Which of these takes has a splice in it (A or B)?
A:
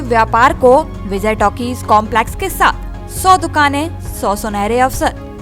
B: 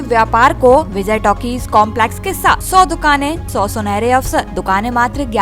B